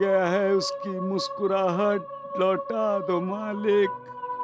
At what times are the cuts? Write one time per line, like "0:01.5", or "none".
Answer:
none